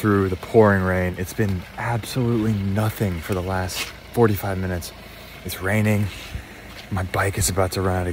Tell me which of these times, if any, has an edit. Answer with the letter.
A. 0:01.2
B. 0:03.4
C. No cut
A